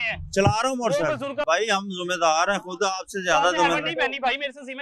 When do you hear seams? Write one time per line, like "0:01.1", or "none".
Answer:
0:01.4